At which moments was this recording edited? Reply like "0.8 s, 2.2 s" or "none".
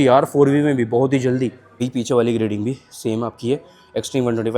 1.8 s